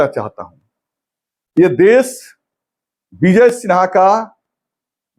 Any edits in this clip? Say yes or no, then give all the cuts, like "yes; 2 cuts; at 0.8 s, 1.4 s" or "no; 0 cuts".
no; 0 cuts